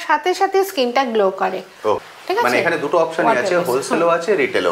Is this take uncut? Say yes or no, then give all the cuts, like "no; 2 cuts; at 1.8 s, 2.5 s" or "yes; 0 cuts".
no; 1 cut; at 2.0 s